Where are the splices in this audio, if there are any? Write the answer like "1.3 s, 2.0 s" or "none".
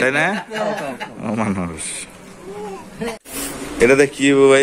3.2 s